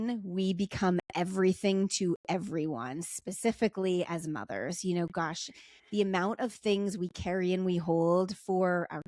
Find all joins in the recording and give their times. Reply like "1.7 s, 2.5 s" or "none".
none